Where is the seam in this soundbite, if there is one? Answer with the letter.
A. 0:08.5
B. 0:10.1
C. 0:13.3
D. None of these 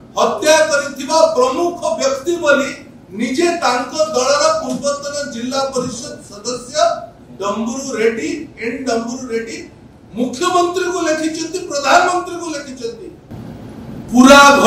C